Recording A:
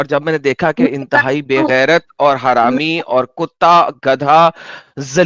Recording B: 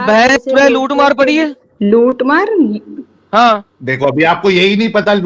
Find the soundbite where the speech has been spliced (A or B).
B